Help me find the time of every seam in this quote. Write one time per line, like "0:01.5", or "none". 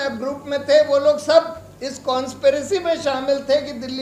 none